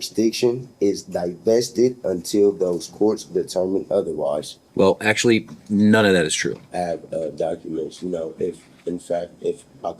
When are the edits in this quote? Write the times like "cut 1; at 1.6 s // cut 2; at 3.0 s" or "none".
cut 1; at 4.6 s // cut 2; at 6.6 s